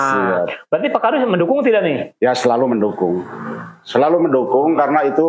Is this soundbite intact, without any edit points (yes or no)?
yes